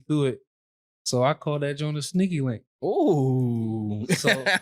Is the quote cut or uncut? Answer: uncut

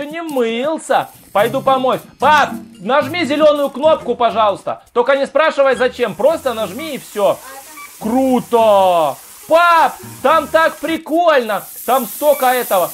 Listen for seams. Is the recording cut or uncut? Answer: uncut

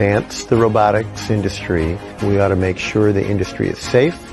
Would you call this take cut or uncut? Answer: cut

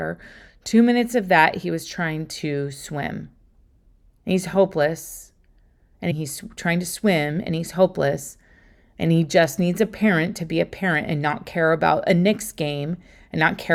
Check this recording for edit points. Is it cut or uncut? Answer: uncut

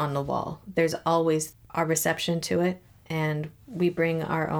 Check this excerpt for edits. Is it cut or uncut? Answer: uncut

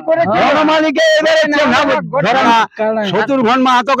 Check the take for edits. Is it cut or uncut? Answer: cut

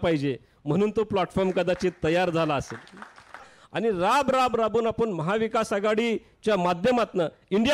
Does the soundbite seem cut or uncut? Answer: cut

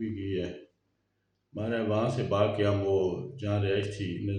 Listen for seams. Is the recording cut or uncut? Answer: uncut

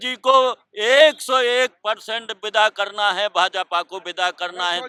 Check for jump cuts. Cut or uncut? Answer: uncut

